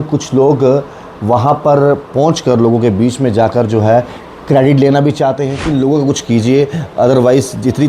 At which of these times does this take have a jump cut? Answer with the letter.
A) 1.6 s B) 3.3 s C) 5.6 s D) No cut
C